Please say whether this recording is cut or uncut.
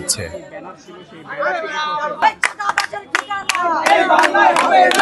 cut